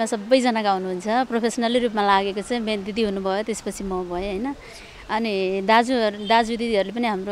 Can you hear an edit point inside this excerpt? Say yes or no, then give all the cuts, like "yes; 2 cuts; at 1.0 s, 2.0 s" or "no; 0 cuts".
no; 0 cuts